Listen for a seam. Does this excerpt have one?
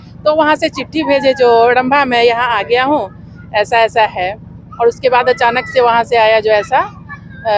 yes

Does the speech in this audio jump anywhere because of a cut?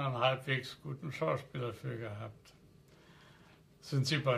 no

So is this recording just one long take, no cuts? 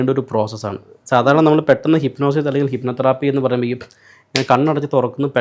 yes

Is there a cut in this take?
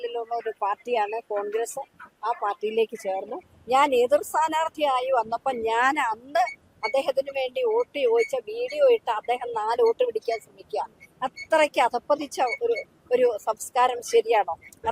yes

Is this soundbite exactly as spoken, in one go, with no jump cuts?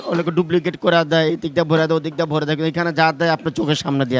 yes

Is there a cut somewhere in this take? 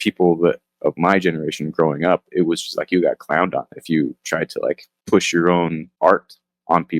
yes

